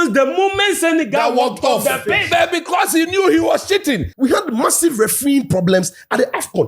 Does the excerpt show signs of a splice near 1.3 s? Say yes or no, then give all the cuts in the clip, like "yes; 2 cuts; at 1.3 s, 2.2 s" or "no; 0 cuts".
no; 1 cut; at 4.1 s